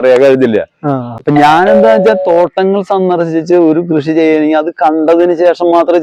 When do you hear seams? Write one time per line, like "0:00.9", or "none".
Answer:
0:01.1